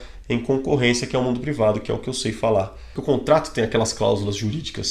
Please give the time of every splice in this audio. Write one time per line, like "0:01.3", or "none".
0:02.9